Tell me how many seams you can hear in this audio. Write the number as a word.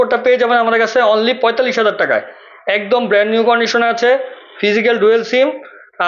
zero